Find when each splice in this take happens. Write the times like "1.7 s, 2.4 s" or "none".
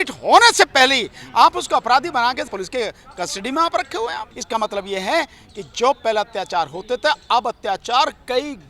4.3 s